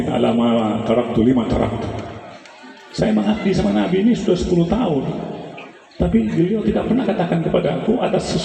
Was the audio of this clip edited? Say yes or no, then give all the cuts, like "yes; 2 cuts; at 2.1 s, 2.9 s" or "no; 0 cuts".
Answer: no; 0 cuts